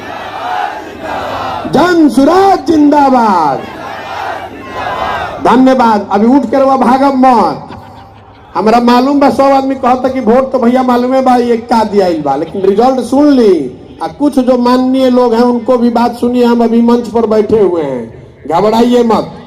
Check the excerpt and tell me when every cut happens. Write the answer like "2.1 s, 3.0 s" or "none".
none